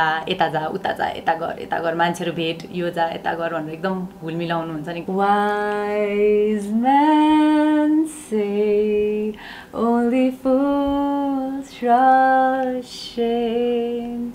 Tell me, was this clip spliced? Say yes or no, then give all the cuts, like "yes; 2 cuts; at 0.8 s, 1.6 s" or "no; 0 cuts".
yes; 1 cut; at 5.0 s